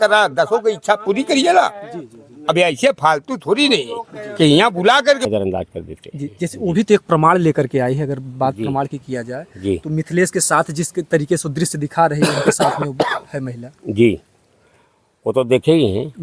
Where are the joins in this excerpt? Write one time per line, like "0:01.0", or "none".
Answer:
0:05.2